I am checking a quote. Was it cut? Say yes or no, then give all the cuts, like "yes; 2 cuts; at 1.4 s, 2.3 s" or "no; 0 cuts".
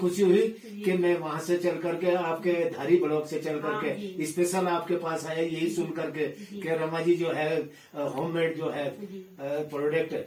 no; 0 cuts